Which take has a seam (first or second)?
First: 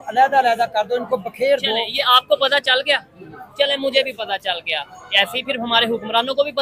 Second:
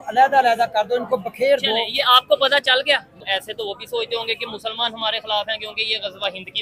second